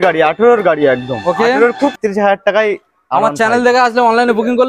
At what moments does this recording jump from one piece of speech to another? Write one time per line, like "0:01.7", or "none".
0:02.0